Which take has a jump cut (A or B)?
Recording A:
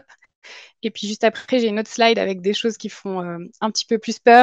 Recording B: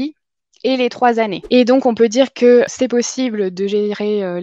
B